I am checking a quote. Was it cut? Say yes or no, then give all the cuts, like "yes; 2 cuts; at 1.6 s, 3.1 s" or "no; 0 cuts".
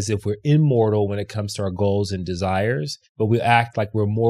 yes; 1 cut; at 3.0 s